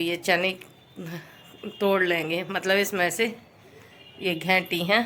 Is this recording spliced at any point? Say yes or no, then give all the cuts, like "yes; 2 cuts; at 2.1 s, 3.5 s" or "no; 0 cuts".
no; 0 cuts